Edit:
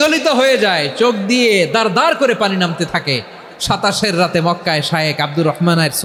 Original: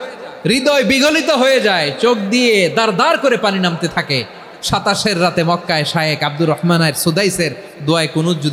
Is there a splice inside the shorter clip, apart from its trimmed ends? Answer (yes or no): no